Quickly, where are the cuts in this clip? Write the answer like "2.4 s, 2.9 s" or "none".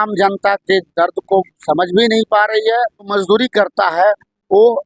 3.1 s